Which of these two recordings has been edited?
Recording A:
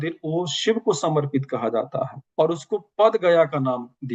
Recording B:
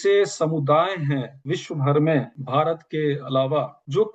B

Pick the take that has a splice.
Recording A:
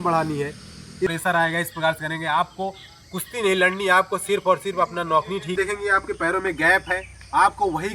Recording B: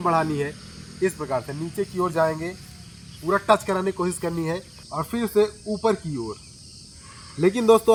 A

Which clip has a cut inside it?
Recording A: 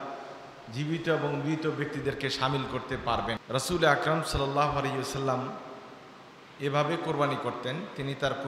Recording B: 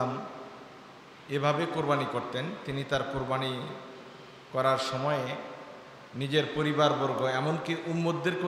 A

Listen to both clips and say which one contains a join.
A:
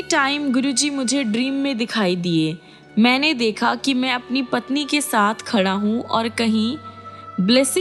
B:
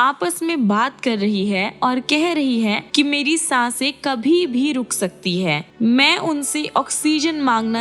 B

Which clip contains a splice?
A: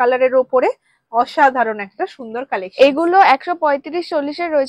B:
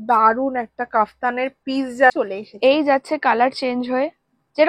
B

